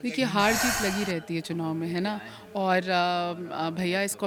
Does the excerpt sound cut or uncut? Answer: uncut